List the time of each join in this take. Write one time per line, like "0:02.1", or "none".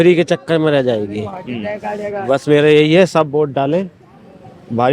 none